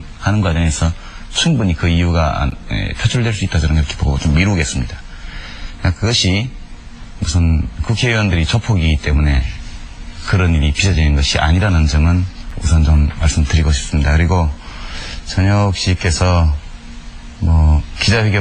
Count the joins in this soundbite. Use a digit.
1